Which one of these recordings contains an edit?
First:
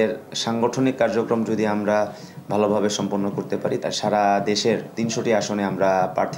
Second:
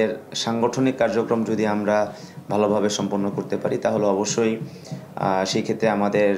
first; 1 cut; at 3.8 s

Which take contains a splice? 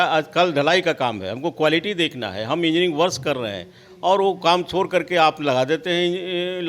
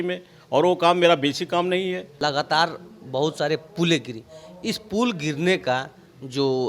second; 1 cut; at 2.1 s

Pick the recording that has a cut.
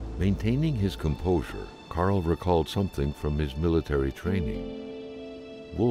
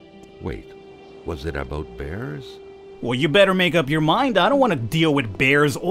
second; 1 cut; at 2.9 s

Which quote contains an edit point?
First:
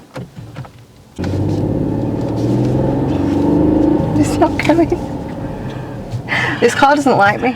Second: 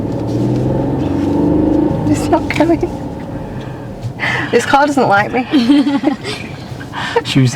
first; 1 cut; at 1.2 s

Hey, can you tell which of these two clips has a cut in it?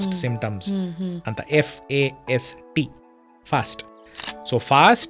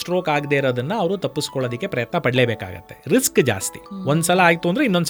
first; 1 cut; at 4.2 s

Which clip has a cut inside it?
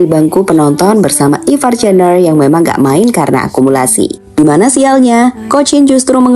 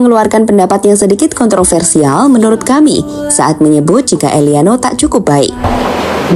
first; 1 cut; at 4.4 s

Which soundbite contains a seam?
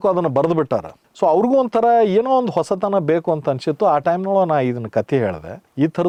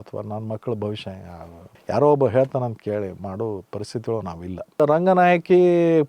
second; 1 cut; at 4.8 s

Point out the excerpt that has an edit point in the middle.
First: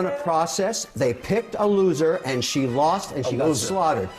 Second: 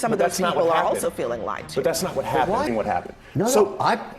second; 1 cut; at 2.6 s

